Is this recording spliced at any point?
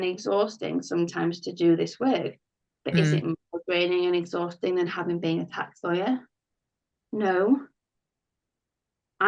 no; 0 cuts

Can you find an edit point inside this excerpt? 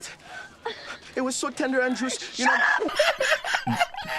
yes; 1 cut; at 2.9 s

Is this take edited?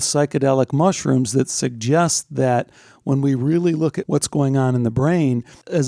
no; 0 cuts

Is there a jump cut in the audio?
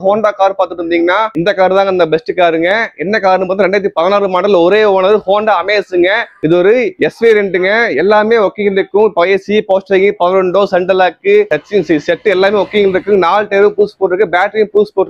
no; 0 cuts

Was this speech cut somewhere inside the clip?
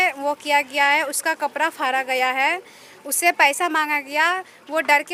no; 0 cuts

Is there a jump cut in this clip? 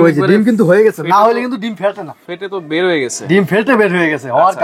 no; 0 cuts

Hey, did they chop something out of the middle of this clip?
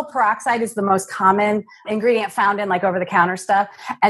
yes; 1 cut; at 1.9 s

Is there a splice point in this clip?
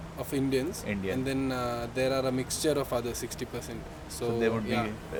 no; 0 cuts

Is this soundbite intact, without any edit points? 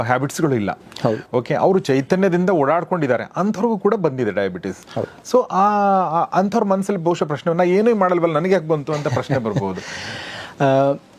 yes; 0 cuts

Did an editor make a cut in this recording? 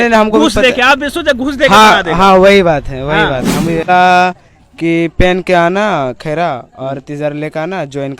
yes; 1 cut; at 3.9 s

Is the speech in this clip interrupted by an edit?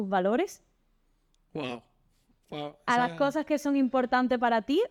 no; 0 cuts

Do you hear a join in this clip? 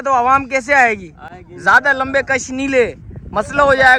no; 0 cuts

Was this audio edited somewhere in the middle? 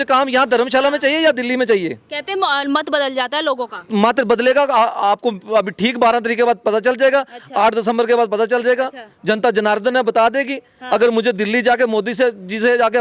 no; 0 cuts

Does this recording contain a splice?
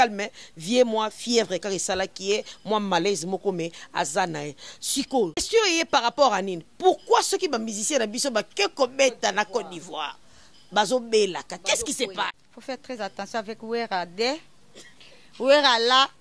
yes; 2 cuts; at 5.5 s, 12.3 s

